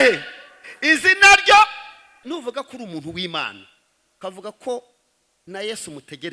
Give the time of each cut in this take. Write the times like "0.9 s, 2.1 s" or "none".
2.2 s